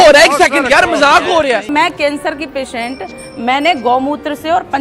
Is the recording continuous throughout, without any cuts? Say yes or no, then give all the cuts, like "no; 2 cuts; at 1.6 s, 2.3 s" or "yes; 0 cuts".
no; 1 cut; at 1.7 s